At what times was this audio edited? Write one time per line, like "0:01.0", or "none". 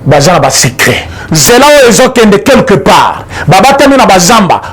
0:01.2